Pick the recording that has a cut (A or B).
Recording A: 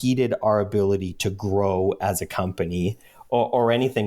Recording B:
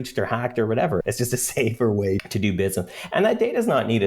B